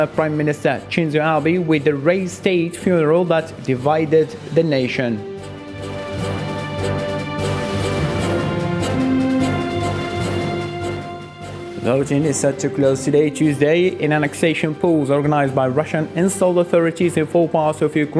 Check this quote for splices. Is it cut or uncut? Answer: uncut